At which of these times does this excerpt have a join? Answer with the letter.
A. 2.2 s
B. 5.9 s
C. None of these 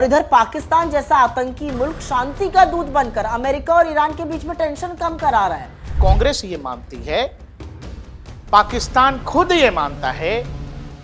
B